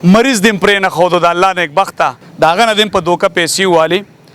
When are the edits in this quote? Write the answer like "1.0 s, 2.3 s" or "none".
2.2 s